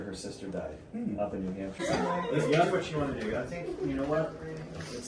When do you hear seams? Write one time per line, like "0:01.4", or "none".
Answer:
0:01.8